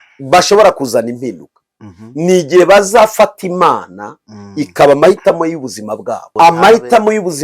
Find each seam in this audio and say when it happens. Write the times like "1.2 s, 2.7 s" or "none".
6.3 s